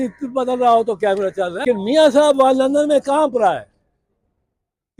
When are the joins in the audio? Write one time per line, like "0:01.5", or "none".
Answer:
0:01.6

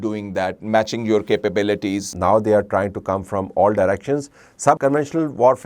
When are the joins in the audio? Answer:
0:02.0
0:04.8

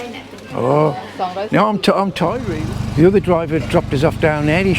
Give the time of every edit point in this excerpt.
0:02.4

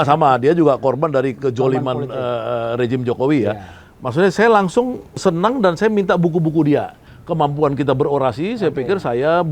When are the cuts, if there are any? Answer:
0:05.1
0:07.1

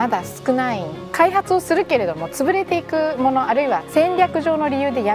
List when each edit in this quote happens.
0:01.0
0:03.9

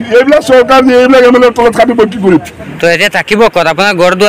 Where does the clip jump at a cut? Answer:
0:02.7

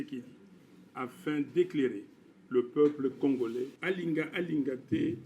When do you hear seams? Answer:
0:03.7

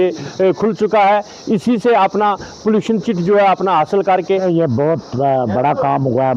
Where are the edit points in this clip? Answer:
0:04.4

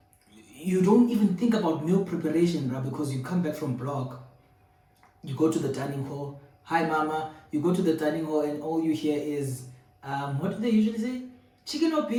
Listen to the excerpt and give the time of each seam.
none

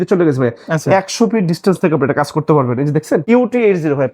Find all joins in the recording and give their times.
0:03.2

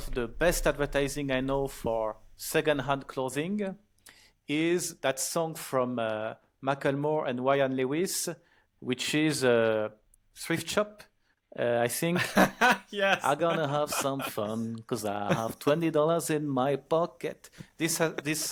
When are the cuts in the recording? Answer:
none

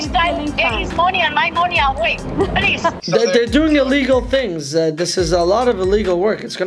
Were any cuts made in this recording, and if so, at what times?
0:03.0

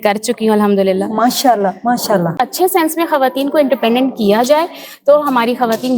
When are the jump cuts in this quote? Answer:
0:02.3

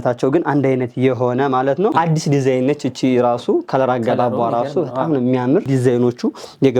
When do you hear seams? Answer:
0:01.9
0:05.7

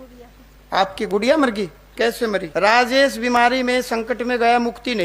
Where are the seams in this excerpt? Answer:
0:02.5

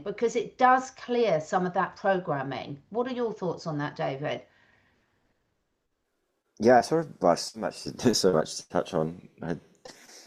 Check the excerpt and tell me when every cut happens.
none

